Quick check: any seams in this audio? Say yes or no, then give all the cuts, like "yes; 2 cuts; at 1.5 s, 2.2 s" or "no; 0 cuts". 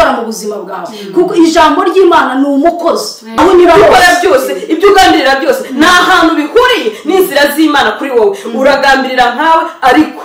yes; 1 cut; at 3.3 s